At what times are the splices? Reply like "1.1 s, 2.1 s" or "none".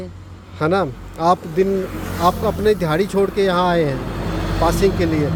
none